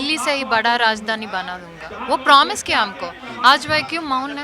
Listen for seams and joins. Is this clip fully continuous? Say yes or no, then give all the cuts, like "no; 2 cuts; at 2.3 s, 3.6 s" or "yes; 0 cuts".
yes; 0 cuts